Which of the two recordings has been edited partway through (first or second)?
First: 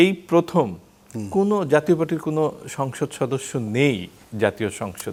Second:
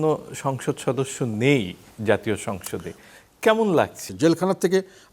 second